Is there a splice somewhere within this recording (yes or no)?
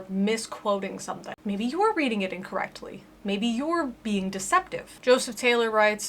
yes